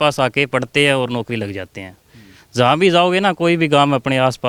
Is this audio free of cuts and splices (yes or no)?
yes